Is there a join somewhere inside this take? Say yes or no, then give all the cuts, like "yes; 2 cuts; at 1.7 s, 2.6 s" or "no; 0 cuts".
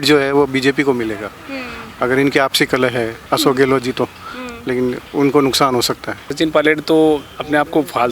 yes; 2 cuts; at 3.2 s, 6.3 s